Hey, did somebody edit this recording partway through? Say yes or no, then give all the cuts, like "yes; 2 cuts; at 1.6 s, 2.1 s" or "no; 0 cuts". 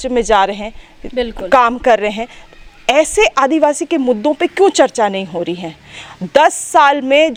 no; 0 cuts